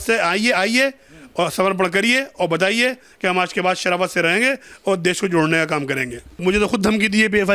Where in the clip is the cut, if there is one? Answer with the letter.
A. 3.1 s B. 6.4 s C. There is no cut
B